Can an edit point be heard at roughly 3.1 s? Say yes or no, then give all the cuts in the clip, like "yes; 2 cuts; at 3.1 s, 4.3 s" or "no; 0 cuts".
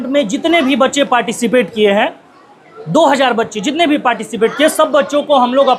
no; 0 cuts